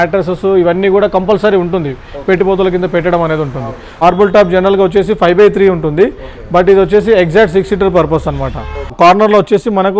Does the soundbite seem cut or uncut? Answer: cut